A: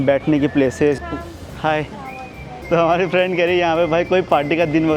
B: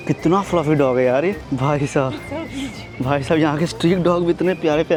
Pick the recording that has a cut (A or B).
A